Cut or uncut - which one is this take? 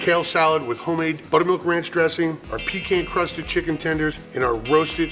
cut